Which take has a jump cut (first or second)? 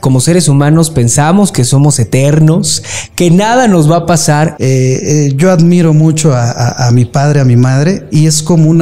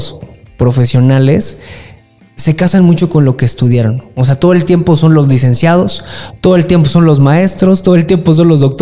first